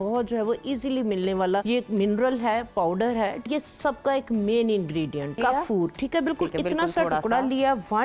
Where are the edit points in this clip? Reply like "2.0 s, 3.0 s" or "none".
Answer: 1.6 s, 3.5 s, 5.4 s